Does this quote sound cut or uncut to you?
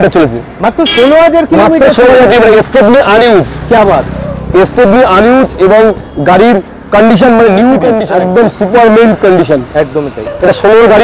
cut